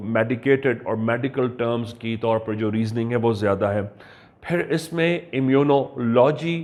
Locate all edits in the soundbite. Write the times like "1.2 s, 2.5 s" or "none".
none